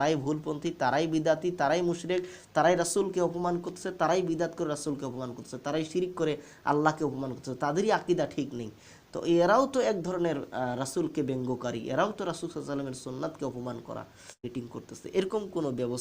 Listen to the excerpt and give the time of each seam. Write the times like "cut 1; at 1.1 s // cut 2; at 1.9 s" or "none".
cut 1; at 14.4 s